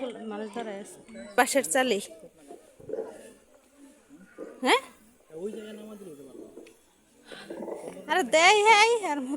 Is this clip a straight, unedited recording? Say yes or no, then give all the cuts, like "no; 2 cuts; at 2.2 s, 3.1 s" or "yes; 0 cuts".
no; 1 cut; at 1.4 s